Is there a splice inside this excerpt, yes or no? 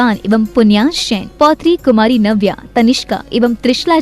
no